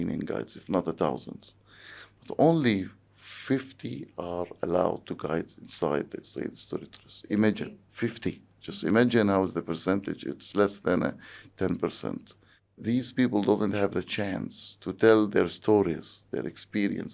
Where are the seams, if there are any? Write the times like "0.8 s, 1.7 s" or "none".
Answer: 12.8 s